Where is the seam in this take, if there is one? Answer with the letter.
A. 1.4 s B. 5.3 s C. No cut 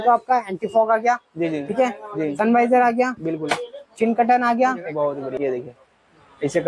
B